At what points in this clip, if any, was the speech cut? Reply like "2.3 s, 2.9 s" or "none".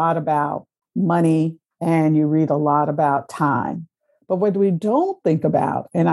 1.7 s